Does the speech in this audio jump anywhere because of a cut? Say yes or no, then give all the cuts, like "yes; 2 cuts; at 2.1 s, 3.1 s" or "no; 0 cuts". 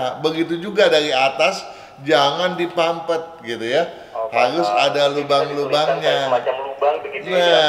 no; 0 cuts